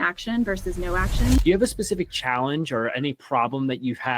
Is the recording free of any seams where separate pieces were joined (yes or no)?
no